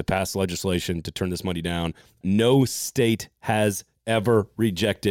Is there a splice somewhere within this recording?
yes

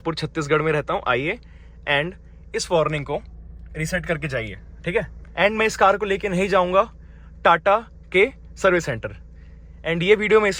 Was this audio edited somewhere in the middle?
yes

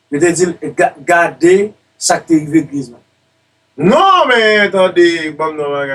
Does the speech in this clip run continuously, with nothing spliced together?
yes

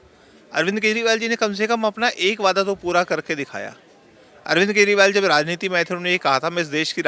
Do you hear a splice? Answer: no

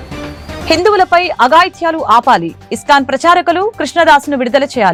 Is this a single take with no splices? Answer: yes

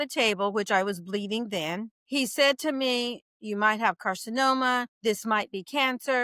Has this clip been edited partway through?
yes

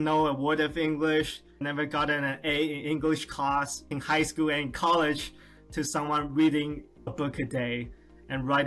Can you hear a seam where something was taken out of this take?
no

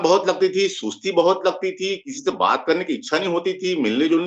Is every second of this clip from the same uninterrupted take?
yes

